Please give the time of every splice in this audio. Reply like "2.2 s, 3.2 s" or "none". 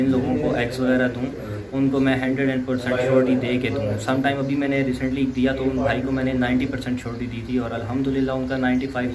none